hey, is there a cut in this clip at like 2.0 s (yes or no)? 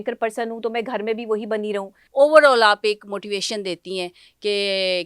yes